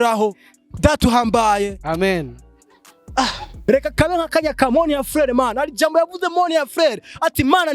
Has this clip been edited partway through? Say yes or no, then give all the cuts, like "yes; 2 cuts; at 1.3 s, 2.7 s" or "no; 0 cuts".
yes; 1 cut; at 3.5 s